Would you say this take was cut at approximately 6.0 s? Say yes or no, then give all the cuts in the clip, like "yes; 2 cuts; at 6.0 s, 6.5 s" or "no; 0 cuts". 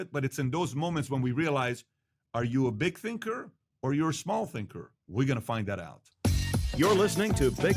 yes; 1 cut; at 6.0 s